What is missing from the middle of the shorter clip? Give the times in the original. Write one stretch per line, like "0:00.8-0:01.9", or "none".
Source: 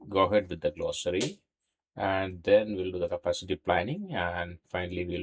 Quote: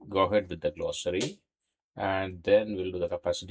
none